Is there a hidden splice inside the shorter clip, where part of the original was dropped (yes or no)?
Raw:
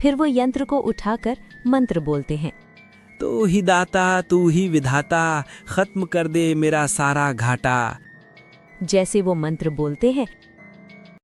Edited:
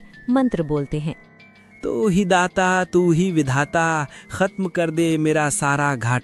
no